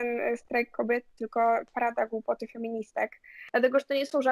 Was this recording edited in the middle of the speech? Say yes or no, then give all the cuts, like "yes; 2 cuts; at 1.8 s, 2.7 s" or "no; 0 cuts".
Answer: yes; 1 cut; at 3.4 s